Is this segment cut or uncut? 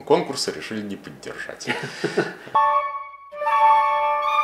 uncut